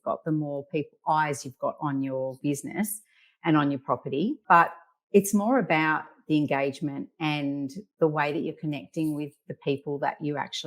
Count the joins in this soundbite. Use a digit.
3